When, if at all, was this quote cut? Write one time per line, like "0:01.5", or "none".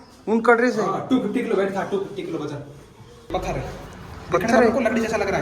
0:03.3